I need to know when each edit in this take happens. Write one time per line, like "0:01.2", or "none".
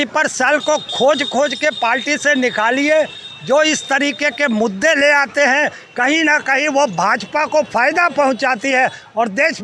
none